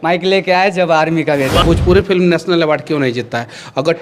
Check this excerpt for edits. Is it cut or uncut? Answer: cut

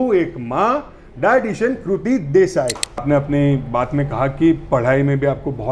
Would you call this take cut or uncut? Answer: cut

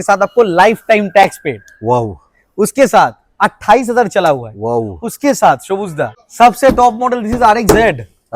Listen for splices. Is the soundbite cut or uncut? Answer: cut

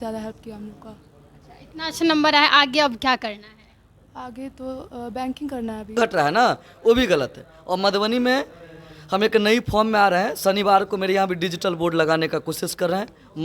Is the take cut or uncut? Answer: cut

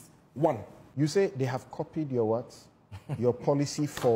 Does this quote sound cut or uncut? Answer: cut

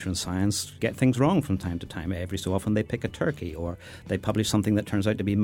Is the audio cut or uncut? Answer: uncut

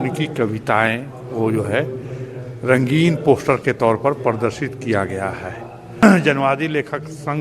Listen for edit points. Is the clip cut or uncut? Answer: cut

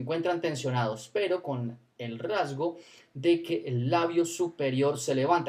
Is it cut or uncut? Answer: uncut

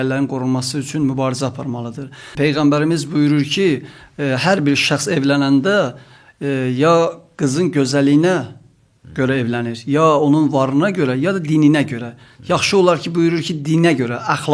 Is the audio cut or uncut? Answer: cut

